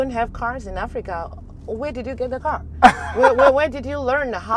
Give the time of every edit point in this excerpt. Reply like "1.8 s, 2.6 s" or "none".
none